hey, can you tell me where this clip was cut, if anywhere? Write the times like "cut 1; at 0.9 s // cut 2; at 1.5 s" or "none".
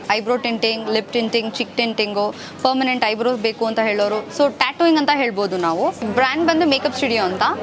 cut 1; at 6.0 s